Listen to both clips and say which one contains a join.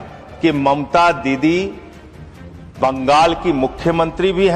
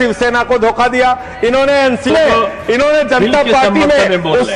second; 1 cut; at 2.1 s

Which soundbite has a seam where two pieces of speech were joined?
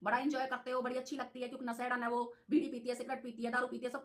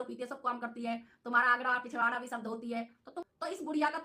second; 1 cut; at 3.0 s

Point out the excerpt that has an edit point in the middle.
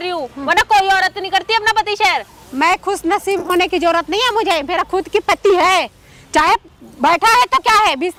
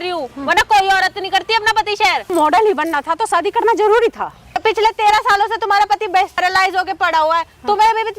second; 3 cuts; at 2.3 s, 4.6 s, 6.4 s

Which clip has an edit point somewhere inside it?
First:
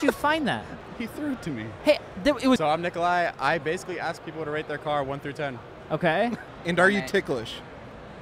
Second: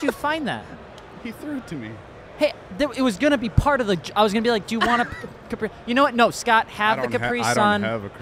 first; 3 cuts; at 1.2 s, 2.6 s, 6.4 s

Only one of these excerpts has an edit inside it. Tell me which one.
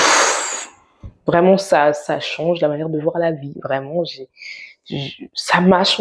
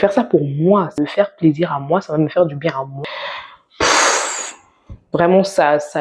second; 2 cuts; at 1.0 s, 2.9 s

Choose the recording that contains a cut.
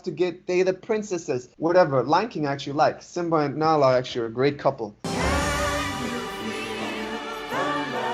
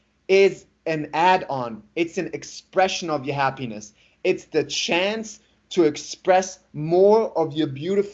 first; 1 cut; at 1.4 s

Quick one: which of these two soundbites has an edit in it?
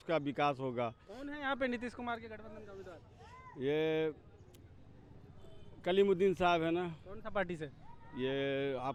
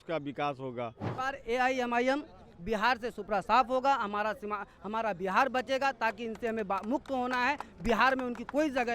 second; 1 cut; at 1.1 s

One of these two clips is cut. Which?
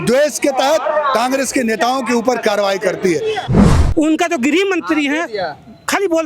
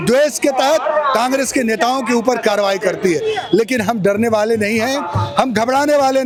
first; 1 cut; at 3.4 s

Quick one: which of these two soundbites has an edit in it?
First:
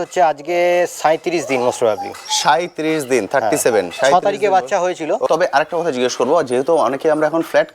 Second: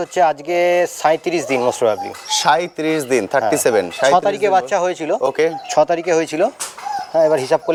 first; 1 cut; at 5.3 s

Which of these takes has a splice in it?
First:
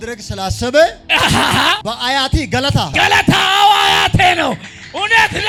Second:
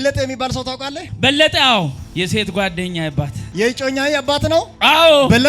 second; 2 cuts; at 2.0 s, 3.4 s

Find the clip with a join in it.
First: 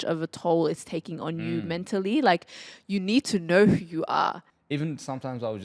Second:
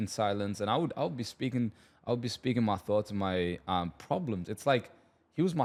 first; 1 cut; at 4.4 s

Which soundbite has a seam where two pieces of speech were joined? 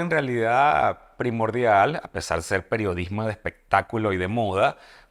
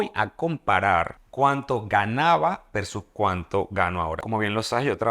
second; 2 cuts; at 1.2 s, 4.2 s

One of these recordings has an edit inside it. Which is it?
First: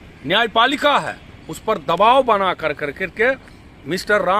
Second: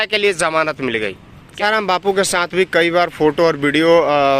second; 1 cut; at 1.6 s

